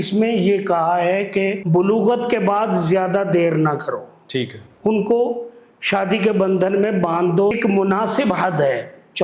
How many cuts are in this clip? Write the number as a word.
two